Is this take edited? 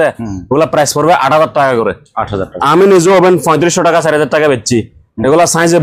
no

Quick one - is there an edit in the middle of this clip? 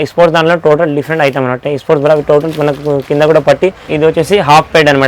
yes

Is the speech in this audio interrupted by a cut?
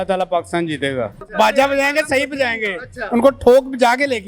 yes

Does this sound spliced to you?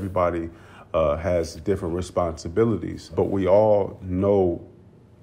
yes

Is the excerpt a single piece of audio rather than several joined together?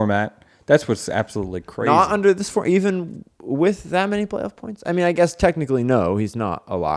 yes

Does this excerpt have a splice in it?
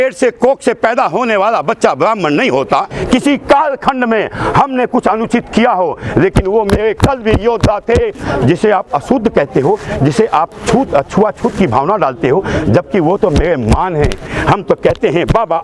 yes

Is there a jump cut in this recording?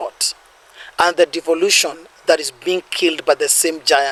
no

